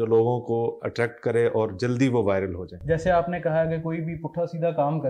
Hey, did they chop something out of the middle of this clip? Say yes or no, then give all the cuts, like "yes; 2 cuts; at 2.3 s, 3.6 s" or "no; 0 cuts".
yes; 1 cut; at 2.7 s